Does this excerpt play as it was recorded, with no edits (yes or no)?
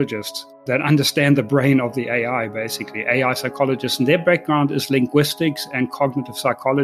yes